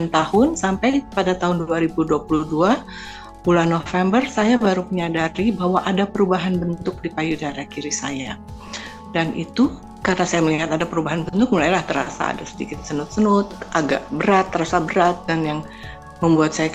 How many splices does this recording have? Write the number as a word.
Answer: two